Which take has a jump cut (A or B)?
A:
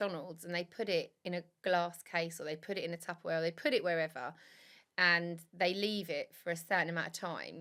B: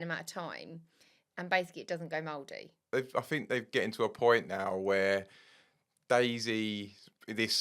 B